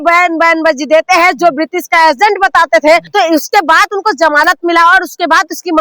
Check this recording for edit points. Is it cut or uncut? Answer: cut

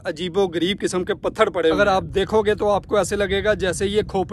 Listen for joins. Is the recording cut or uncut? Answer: cut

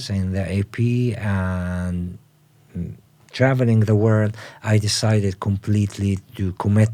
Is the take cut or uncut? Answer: uncut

